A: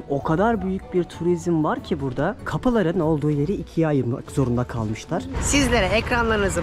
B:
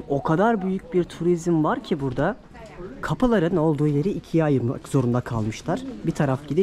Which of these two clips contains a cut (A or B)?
A